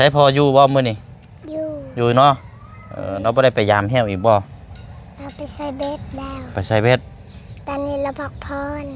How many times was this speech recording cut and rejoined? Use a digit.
0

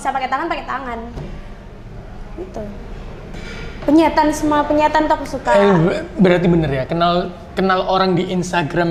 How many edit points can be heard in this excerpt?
0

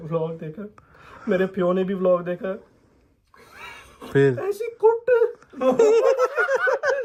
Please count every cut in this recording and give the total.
0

